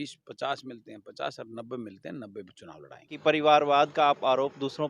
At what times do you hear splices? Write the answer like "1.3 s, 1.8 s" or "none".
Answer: 3.1 s